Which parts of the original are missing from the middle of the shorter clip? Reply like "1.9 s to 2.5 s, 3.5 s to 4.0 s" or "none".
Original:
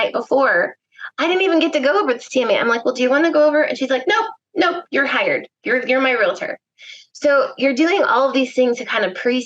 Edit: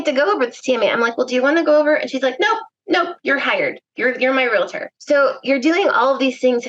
6.5 s to 7.0 s